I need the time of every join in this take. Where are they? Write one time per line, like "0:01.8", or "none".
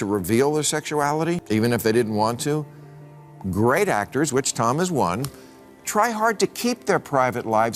0:01.4